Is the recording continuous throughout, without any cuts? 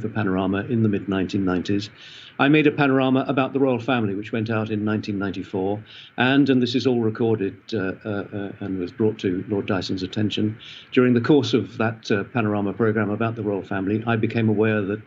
yes; 0 cuts

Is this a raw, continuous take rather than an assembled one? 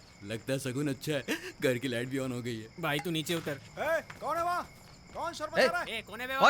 no; 2 cuts; at 2.7 s, 3.7 s

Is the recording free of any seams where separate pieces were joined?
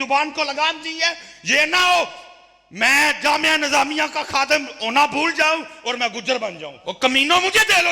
no; 1 cut; at 6.9 s

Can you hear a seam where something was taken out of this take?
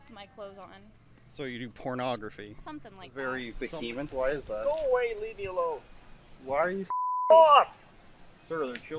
yes; 1 cut; at 3.1 s

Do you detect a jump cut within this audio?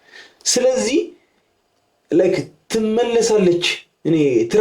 no; 0 cuts

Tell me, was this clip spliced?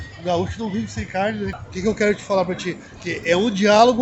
yes; 1 cut; at 1.6 s

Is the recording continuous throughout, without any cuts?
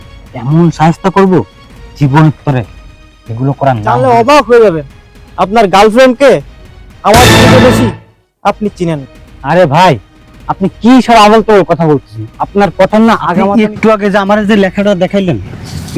no; 2 cuts; at 4.0 s, 13.4 s

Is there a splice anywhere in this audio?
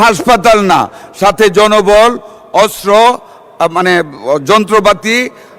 no; 0 cuts

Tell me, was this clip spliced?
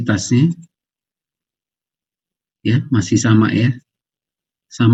no; 0 cuts

